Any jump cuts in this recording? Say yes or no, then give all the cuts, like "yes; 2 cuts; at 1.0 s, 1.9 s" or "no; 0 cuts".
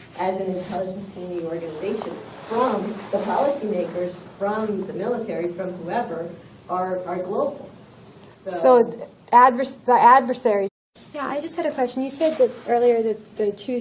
no; 0 cuts